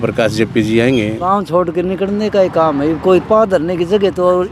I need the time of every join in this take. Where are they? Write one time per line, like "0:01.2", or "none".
0:01.2